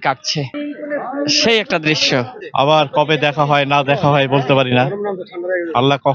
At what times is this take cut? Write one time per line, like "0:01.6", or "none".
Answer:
0:02.4